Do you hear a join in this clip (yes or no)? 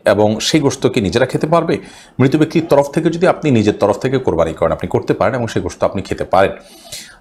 no